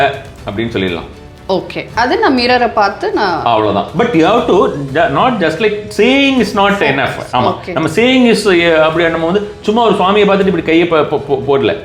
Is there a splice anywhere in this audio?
no; 0 cuts

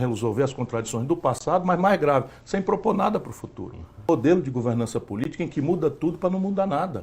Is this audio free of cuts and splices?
no; 1 cut; at 4.1 s

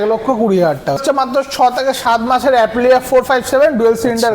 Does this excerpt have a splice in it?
yes; 1 cut; at 1.0 s

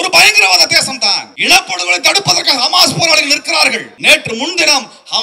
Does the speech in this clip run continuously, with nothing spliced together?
no; 2 cuts; at 1.3 s, 3.9 s

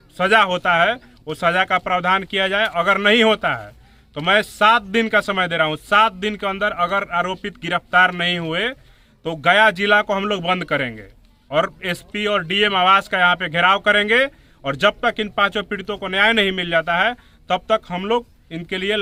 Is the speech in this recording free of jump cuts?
yes; 0 cuts

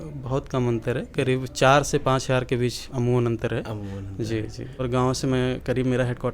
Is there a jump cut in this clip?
yes; 1 cut; at 4.8 s

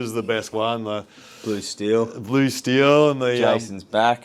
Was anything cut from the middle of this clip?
no; 0 cuts

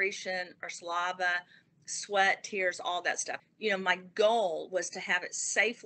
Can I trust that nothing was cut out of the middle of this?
no; 1 cut; at 3.3 s

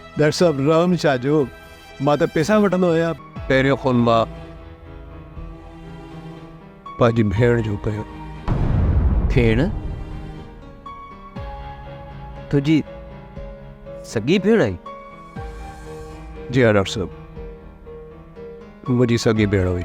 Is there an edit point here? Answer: yes; 1 cut; at 3.1 s

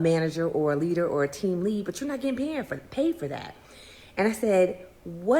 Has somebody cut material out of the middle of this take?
yes; 1 cut; at 3.0 s

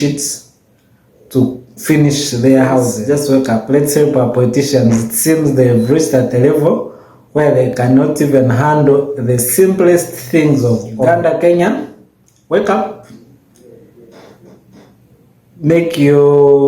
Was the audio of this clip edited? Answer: yes; 2 cuts; at 3.0 s, 11.1 s

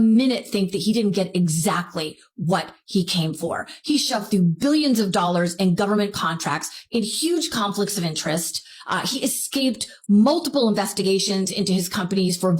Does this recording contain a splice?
no; 0 cuts

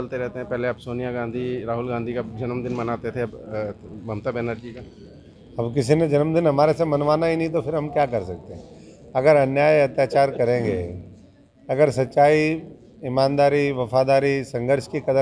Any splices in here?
no; 0 cuts

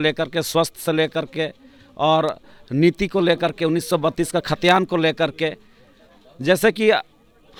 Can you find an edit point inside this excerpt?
no; 0 cuts

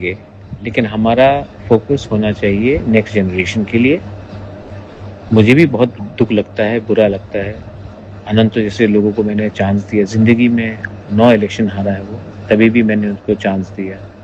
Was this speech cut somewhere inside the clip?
no; 0 cuts

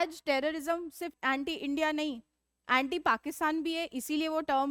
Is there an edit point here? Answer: yes; 1 cut; at 1.2 s

